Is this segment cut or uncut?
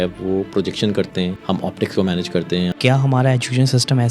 cut